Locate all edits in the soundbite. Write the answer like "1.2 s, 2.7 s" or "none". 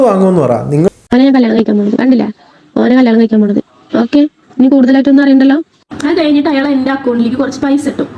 0.9 s, 5.8 s